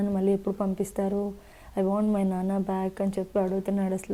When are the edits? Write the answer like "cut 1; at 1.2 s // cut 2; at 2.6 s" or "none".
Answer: none